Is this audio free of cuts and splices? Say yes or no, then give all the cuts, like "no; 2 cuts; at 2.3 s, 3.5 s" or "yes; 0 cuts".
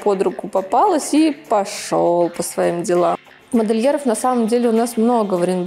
no; 1 cut; at 3.3 s